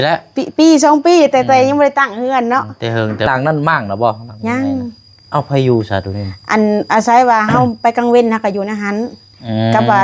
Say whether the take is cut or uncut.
cut